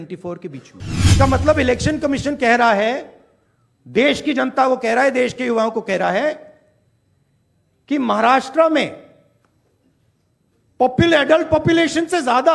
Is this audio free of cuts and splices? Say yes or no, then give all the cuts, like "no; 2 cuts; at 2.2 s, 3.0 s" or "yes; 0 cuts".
no; 1 cut; at 1.1 s